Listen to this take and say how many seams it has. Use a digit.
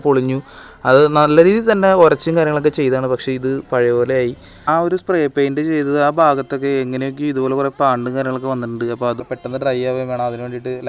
2